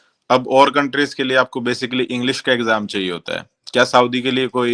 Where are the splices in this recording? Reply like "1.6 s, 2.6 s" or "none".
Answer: none